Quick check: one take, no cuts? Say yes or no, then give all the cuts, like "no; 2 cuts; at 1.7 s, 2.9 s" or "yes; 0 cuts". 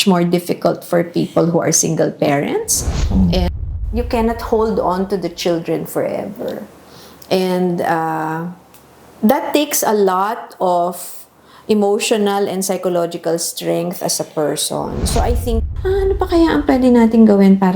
no; 2 cuts; at 3.5 s, 15.5 s